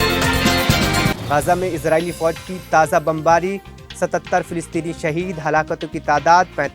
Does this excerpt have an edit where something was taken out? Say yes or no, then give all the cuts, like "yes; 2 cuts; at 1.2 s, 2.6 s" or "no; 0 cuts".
yes; 1 cut; at 1.2 s